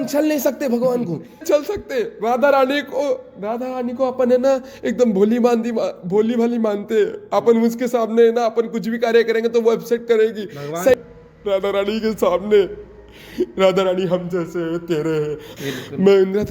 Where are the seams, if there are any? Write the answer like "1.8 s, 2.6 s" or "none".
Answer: 1.4 s, 11.0 s, 15.6 s